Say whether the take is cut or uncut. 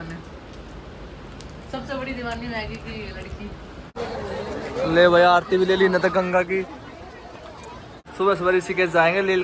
cut